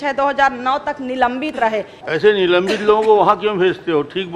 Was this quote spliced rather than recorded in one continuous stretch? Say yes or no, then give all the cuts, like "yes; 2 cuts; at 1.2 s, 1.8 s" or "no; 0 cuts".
yes; 1 cut; at 1.9 s